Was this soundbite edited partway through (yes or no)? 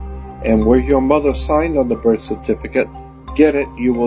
no